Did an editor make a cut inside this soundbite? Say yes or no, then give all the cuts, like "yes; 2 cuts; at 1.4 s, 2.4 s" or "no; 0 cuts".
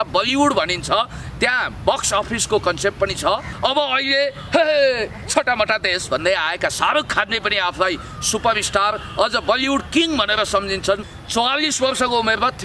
yes; 2 cuts; at 3.5 s, 11.1 s